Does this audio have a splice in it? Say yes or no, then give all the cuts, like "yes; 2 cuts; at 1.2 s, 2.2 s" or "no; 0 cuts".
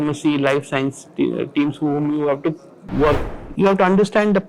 yes; 1 cut; at 3.2 s